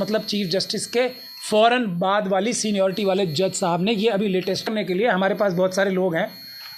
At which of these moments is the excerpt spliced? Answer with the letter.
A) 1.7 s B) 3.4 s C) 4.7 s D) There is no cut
C